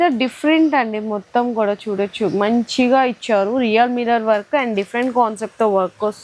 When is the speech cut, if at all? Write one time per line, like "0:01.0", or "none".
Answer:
none

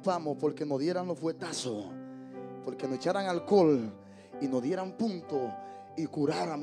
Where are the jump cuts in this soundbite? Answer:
none

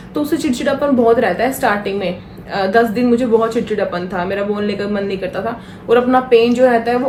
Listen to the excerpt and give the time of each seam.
none

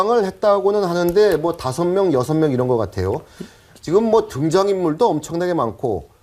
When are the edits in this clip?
none

